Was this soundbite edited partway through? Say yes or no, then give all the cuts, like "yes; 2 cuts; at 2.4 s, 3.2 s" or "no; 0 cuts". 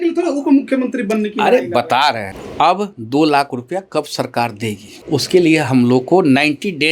yes; 2 cuts; at 2.3 s, 4.9 s